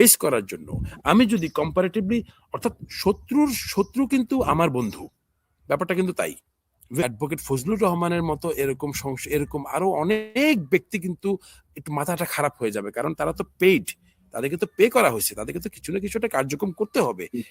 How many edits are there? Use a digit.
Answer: 1